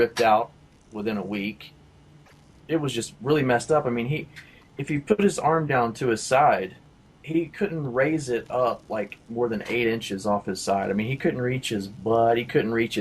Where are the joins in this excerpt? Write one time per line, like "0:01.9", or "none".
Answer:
0:03.9